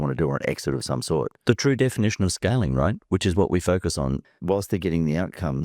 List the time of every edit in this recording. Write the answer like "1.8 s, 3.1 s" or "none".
1.3 s, 4.2 s